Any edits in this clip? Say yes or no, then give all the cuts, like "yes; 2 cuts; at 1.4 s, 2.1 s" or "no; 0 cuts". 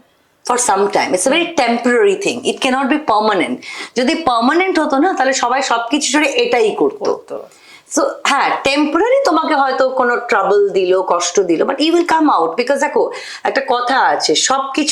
no; 0 cuts